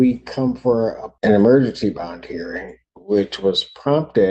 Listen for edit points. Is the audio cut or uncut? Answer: cut